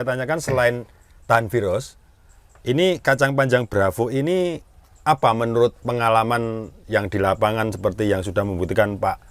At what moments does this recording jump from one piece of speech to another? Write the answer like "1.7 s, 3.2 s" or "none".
none

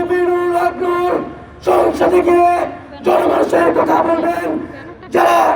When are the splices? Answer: none

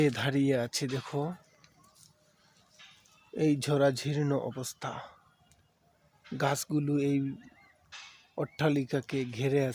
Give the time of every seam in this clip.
none

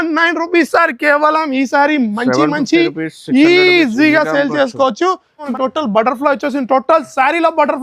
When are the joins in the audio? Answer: 5.4 s

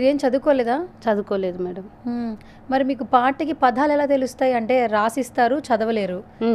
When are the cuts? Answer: none

